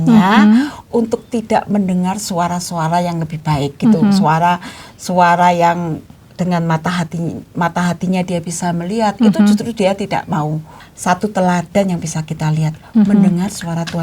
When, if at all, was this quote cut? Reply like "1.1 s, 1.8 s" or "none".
10.7 s